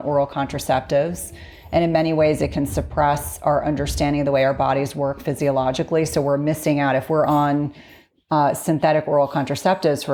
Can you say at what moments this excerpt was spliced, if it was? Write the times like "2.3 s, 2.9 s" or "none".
none